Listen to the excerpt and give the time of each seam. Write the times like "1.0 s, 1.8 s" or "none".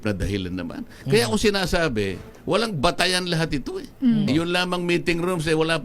4.3 s